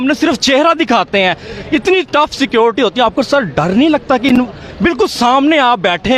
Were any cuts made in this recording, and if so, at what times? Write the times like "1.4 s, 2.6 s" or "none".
none